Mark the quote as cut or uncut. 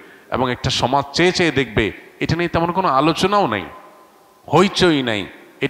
uncut